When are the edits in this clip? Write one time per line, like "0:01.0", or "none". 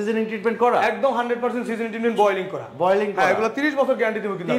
none